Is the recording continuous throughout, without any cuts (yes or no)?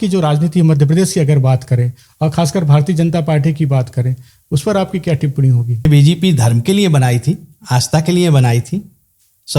no